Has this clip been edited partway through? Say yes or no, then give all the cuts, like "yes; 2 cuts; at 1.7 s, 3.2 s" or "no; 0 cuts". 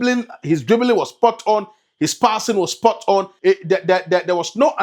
yes; 1 cut; at 3.3 s